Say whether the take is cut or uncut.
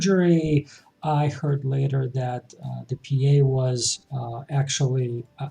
uncut